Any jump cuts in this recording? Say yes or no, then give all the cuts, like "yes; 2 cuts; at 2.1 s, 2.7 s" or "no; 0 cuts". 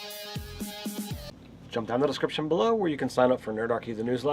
yes; 1 cut; at 1.2 s